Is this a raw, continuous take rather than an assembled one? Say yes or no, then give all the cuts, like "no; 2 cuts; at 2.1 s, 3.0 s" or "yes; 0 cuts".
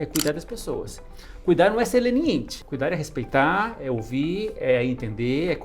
no; 1 cut; at 2.5 s